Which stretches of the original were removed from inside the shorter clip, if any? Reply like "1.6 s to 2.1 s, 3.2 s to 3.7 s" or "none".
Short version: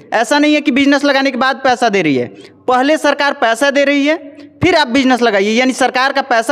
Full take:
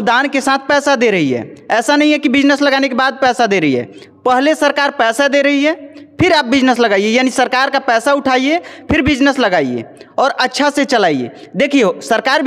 none